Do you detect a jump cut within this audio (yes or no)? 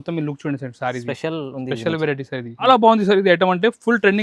yes